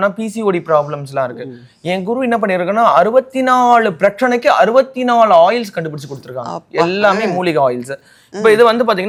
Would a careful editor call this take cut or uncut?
uncut